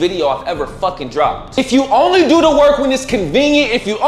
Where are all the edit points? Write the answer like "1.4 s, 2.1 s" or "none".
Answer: 1.6 s